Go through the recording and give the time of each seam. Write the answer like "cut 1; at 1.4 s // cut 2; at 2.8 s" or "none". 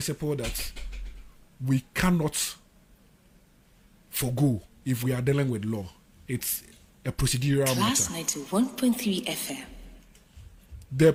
none